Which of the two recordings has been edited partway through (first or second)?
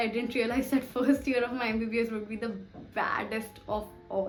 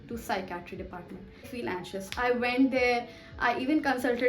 second